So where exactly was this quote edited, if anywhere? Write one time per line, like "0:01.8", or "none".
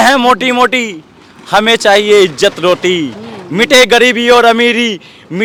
none